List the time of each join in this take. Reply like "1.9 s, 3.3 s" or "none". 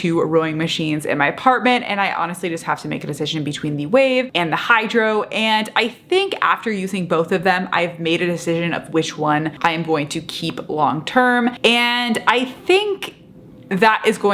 9.5 s, 11.6 s